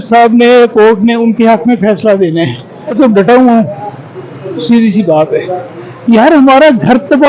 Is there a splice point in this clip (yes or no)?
yes